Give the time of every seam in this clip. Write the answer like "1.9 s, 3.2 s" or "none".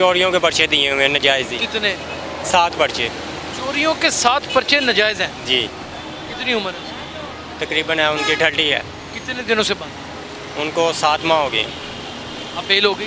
none